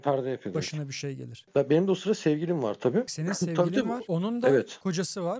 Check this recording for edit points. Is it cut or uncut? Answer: cut